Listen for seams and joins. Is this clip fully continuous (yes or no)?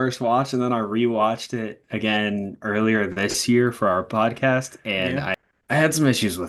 no